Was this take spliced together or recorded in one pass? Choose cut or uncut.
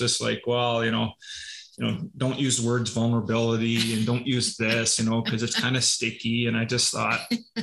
uncut